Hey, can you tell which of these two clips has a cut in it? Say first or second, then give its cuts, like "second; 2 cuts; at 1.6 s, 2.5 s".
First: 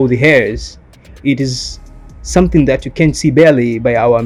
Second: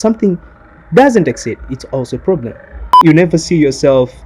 second; 1 cut; at 3.0 s